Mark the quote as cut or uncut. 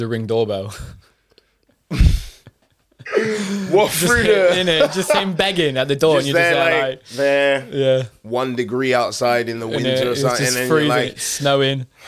uncut